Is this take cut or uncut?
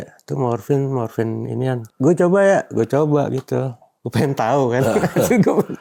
cut